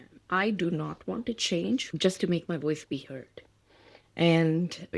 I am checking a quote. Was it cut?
yes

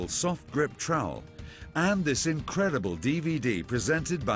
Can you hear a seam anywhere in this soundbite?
yes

